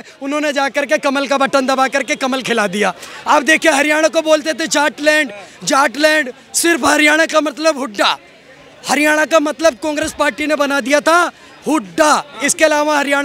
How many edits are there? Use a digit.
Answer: 0